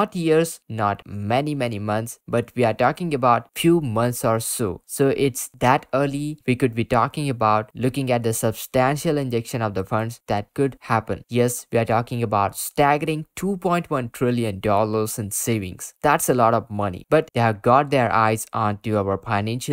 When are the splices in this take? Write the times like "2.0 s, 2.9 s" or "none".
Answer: 11.2 s, 17.3 s